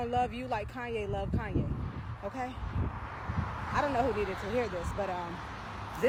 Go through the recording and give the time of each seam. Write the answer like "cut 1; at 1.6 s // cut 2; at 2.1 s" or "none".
none